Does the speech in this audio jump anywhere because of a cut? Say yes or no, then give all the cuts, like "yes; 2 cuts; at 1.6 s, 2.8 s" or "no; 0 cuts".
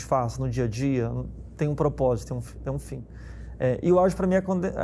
no; 0 cuts